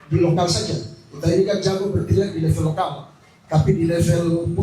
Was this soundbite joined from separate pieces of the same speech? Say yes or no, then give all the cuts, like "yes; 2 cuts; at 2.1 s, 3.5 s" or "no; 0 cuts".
no; 0 cuts